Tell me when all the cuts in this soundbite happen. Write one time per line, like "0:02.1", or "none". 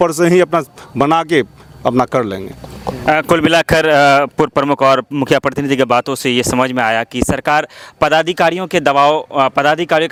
none